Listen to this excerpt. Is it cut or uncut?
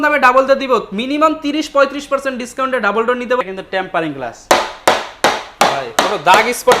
cut